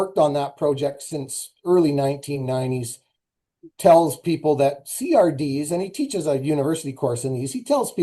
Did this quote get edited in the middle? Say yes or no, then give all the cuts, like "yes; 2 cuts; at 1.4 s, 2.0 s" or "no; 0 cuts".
no; 0 cuts